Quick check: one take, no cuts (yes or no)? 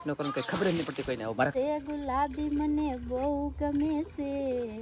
no